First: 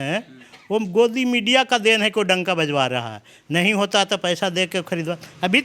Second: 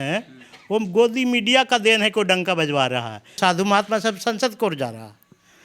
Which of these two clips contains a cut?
second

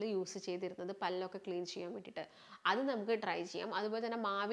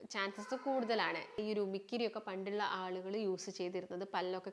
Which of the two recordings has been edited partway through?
second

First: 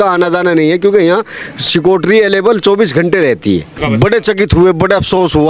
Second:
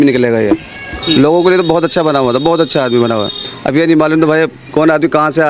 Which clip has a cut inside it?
first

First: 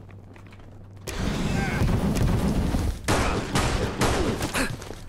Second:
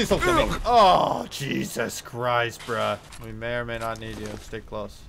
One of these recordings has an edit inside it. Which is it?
second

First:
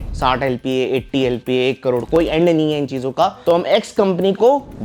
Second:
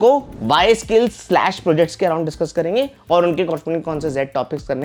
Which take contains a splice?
first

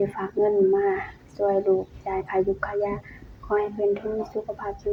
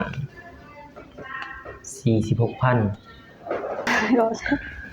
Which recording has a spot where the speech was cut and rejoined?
second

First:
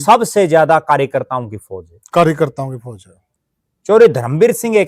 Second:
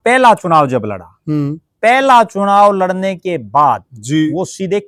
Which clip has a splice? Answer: first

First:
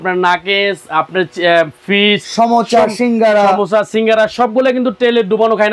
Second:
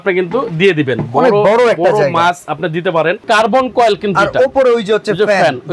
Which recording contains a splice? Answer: second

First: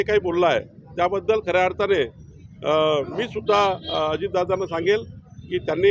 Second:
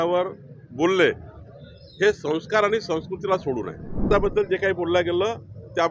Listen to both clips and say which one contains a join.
second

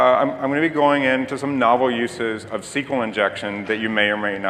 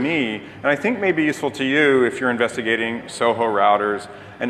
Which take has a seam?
first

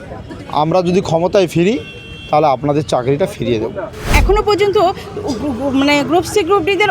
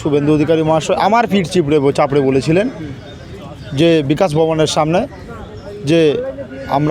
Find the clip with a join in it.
first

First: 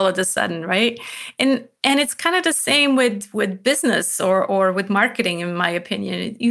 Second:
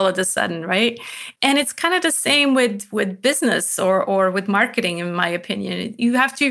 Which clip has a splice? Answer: second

